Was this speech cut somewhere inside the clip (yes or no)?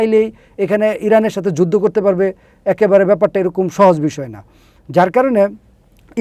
no